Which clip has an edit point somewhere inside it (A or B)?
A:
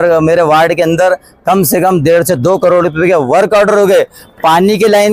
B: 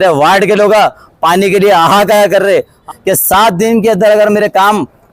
B